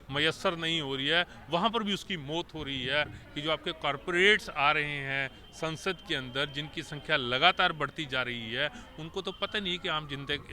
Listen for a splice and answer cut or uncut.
cut